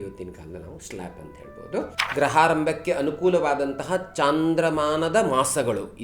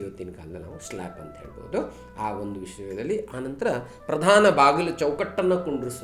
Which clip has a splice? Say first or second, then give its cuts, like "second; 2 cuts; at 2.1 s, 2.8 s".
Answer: first; 1 cut; at 2.0 s